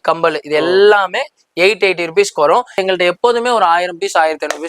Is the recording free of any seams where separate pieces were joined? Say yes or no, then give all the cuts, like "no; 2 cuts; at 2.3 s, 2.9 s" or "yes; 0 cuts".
no; 1 cut; at 2.8 s